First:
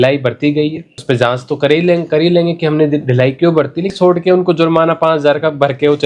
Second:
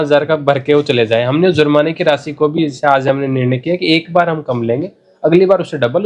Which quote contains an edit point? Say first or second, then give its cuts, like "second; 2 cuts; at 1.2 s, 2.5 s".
first; 2 cuts; at 1.0 s, 3.9 s